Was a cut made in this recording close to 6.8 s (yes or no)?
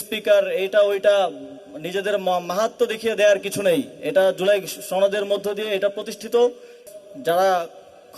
yes